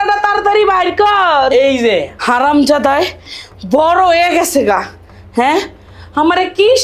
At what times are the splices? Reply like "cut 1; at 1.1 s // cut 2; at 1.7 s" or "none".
cut 1; at 2.1 s

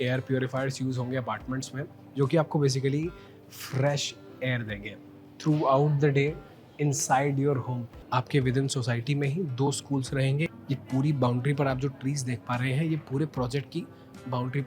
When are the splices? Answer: cut 1; at 7.9 s // cut 2; at 10.5 s

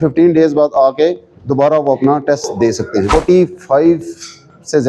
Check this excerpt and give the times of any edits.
cut 1; at 3.1 s

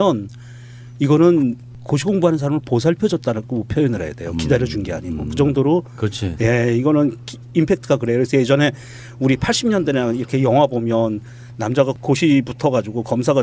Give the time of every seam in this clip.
cut 1; at 12.0 s

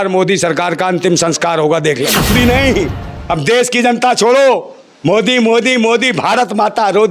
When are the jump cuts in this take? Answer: cut 1; at 2.2 s

